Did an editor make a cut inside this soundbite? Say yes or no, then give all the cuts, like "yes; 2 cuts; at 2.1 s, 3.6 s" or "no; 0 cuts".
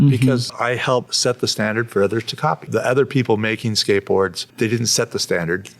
yes; 3 cuts; at 0.8 s, 2.6 s, 4.4 s